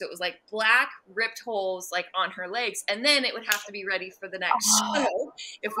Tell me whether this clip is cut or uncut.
uncut